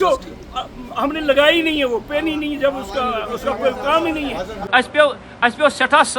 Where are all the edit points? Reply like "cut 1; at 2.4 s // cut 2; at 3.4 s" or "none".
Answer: cut 1; at 4.6 s